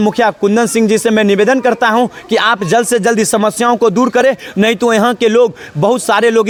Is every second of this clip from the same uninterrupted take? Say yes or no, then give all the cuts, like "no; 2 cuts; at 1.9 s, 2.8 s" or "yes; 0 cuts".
yes; 0 cuts